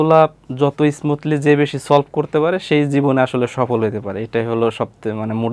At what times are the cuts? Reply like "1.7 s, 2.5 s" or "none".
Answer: none